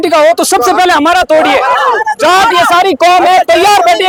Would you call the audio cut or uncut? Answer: uncut